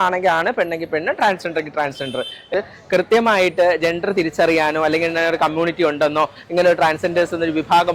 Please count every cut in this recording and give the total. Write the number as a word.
one